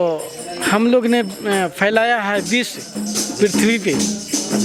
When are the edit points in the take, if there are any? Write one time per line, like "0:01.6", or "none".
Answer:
none